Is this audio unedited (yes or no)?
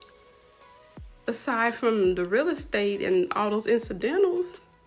yes